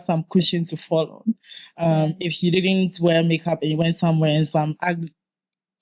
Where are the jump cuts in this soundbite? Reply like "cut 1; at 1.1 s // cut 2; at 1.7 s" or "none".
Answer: none

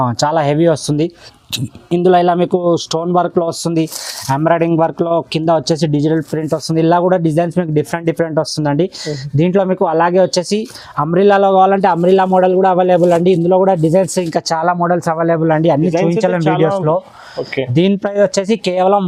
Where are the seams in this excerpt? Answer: none

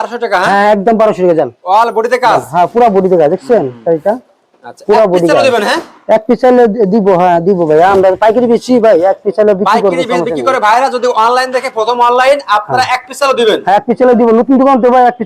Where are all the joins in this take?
none

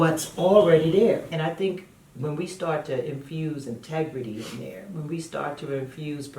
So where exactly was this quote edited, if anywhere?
cut 1; at 1.3 s

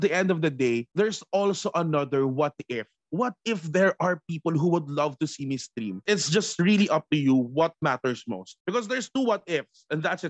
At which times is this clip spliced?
cut 1; at 8.5 s

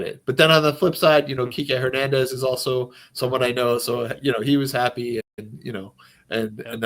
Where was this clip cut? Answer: none

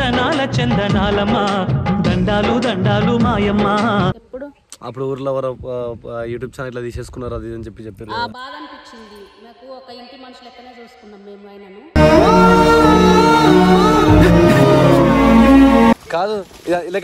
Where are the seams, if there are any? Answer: cut 1; at 4.1 s // cut 2; at 16.0 s

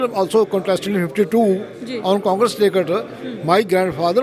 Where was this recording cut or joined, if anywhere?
none

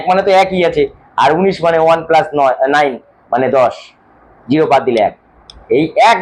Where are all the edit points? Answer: none

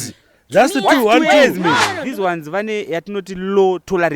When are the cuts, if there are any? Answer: cut 1; at 2.0 s

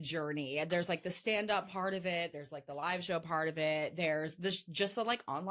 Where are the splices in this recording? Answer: none

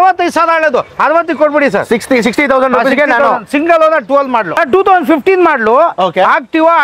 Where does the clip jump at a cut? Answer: cut 1; at 4.6 s

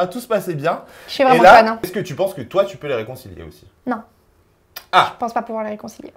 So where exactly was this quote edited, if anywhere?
cut 1; at 1.8 s

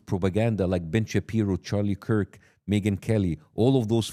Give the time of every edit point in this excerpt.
none

